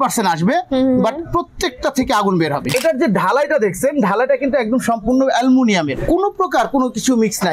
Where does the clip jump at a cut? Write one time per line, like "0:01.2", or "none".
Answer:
0:02.7
0:06.0